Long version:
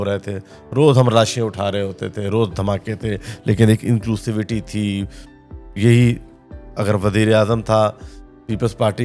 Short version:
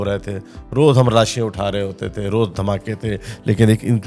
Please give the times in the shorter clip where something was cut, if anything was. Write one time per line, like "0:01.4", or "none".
none

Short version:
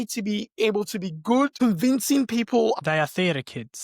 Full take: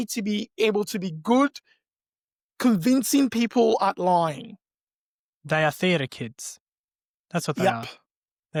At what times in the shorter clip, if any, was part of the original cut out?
0:01.5
0:02.8

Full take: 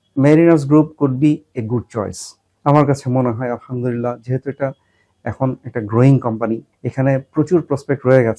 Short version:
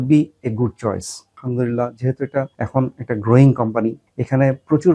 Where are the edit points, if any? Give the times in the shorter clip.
0:01.4
0:02.6

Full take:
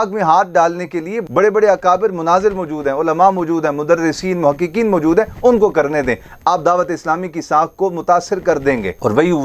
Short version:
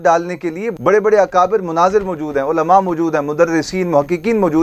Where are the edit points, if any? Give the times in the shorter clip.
none

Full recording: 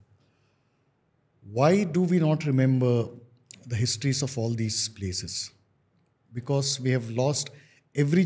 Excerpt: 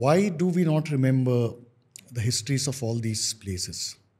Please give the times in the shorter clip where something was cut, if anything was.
none

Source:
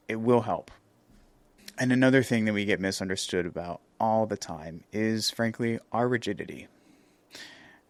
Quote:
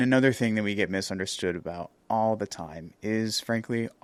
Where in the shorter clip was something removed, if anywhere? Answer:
none

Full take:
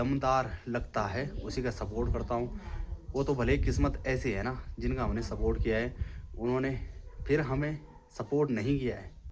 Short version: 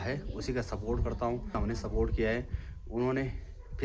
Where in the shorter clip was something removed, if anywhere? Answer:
0:01.5

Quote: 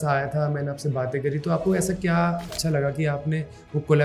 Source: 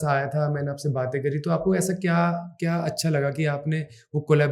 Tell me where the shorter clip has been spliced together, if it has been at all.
0:02.5

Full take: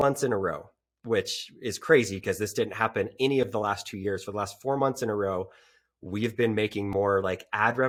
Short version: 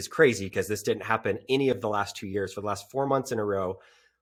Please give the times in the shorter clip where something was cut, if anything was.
none

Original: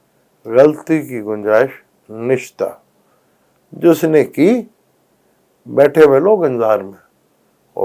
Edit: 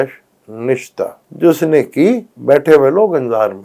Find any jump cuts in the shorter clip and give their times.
0:01.2
0:02.3

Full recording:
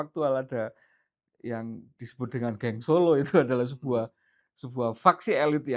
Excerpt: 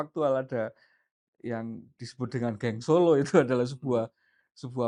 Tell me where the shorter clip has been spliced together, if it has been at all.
none

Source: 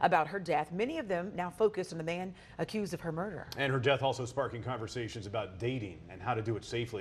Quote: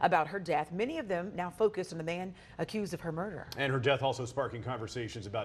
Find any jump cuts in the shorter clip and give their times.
none

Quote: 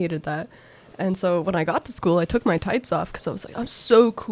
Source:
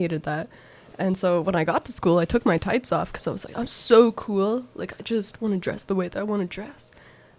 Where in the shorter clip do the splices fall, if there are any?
none

